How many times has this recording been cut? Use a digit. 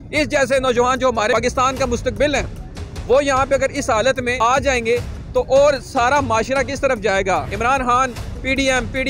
3